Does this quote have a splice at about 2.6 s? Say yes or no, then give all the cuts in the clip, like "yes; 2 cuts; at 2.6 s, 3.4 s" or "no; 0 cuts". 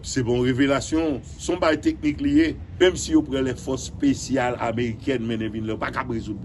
yes; 1 cut; at 2.6 s